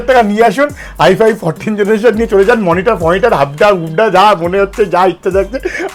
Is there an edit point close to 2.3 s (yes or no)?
no